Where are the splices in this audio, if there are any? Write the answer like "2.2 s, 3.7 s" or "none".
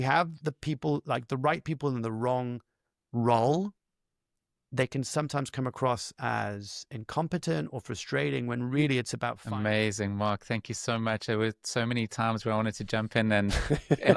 9.3 s